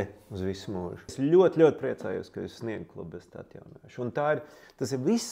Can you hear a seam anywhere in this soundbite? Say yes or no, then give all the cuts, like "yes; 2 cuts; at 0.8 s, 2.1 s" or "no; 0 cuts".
yes; 1 cut; at 1.1 s